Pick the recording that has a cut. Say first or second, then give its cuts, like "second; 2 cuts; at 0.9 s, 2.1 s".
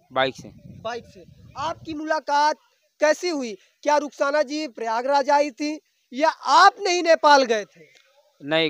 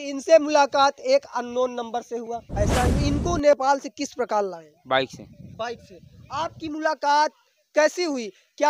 second; 1 cut; at 3.0 s